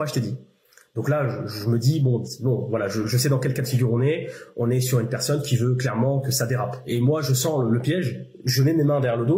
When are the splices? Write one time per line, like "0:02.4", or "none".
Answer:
none